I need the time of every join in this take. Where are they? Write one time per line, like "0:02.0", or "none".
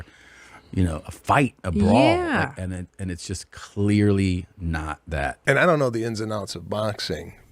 0:05.3